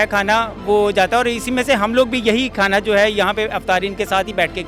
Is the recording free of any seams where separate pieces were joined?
yes; 0 cuts

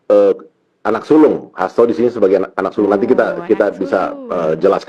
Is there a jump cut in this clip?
no; 0 cuts

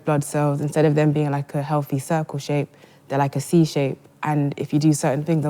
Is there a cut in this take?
no; 0 cuts

